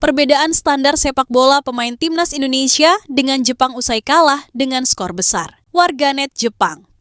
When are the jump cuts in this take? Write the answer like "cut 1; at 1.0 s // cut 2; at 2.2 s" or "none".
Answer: cut 1; at 5.6 s

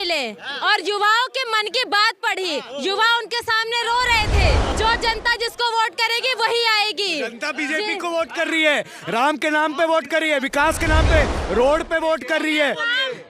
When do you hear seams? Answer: cut 1; at 4.7 s

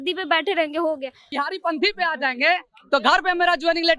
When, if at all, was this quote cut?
cut 1; at 1.3 s

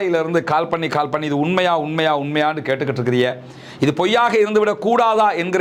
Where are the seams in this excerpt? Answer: none

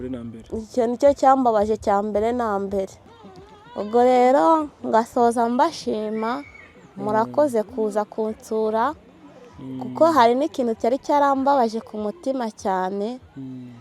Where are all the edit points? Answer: cut 1; at 3.0 s

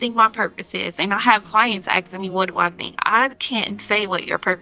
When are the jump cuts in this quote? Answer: none

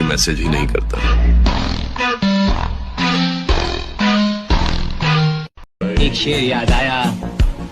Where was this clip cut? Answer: cut 1; at 5.6 s

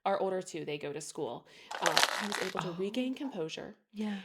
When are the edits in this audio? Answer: cut 1; at 2.0 s

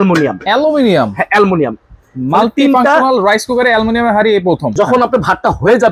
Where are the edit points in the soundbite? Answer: cut 1; at 4.7 s

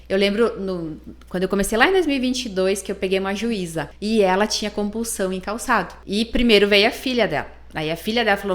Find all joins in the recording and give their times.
cut 1; at 3.9 s // cut 2; at 6.0 s

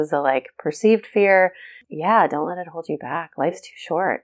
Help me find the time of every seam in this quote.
none

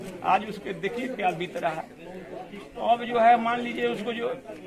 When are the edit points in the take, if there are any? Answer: none

